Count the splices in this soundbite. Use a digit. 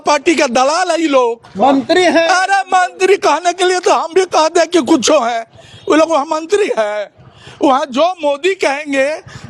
0